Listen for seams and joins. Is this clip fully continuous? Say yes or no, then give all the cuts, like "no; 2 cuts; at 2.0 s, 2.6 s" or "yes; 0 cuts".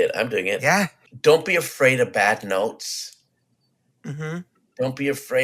no; 1 cut; at 1.0 s